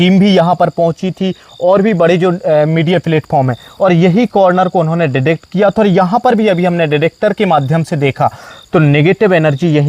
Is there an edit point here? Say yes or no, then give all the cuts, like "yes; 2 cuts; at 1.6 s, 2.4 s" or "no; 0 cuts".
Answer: no; 0 cuts